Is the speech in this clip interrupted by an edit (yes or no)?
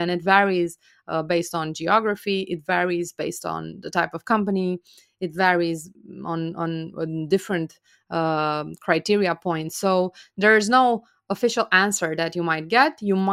no